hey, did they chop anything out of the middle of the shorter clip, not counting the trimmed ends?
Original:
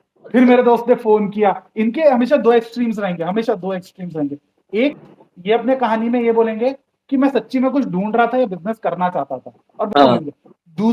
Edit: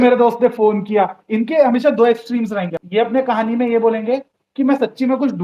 yes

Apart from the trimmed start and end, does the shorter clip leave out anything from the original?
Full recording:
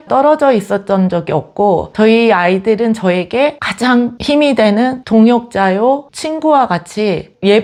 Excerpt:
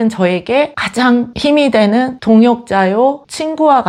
no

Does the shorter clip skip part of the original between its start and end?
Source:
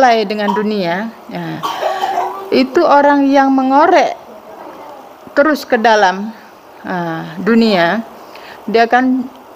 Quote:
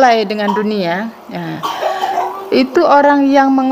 no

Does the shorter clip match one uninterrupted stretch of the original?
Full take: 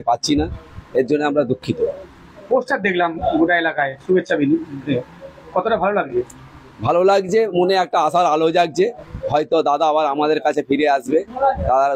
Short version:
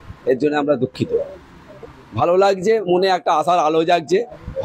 no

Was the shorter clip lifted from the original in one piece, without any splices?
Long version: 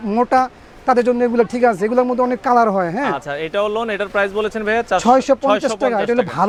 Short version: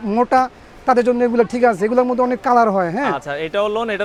yes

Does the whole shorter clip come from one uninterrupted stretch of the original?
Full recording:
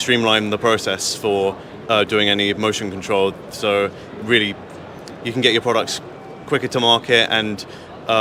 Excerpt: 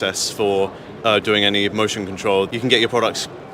no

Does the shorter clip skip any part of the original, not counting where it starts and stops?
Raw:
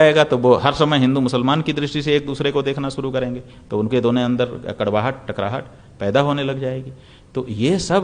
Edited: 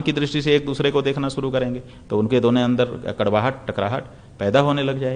no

